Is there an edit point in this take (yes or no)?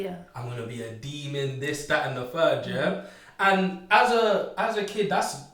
no